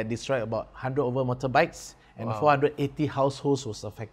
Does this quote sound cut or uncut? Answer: uncut